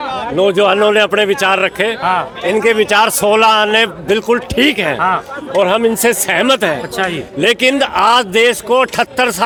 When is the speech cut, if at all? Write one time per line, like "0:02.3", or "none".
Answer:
none